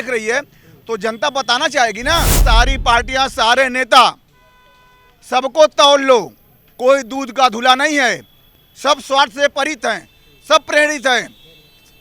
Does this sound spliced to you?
yes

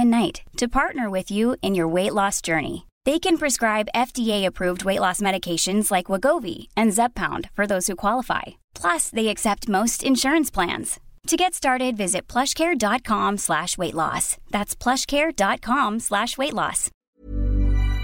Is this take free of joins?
no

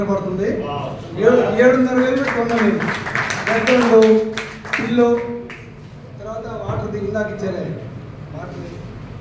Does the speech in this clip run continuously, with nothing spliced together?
yes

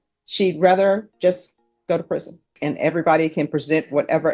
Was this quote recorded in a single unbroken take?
no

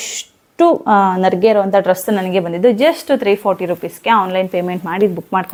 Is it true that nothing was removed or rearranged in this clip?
yes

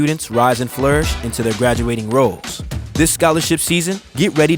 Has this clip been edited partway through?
no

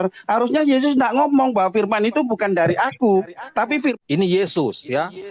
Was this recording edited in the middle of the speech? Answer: yes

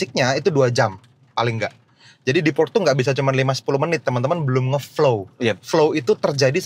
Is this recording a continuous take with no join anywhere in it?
yes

